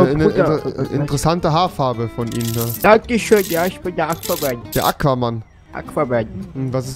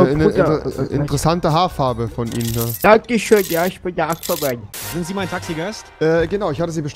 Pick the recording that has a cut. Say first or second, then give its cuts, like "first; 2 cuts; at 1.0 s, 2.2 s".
second; 1 cut; at 4.7 s